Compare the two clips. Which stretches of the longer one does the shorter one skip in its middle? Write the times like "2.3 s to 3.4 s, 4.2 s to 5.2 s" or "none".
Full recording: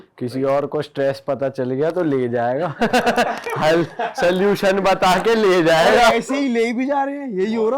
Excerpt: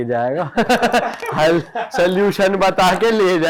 none